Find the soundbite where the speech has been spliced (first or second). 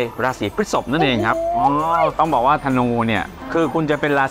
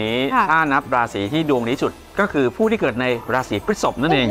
first